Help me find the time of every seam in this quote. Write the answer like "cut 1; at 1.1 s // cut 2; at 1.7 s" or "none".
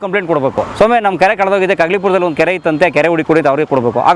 none